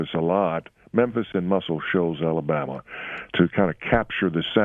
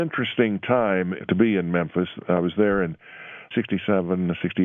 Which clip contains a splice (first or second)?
second